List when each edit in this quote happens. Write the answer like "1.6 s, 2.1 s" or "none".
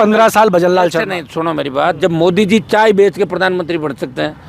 none